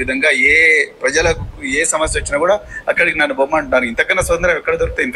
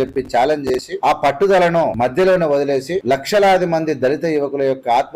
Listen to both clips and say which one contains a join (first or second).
second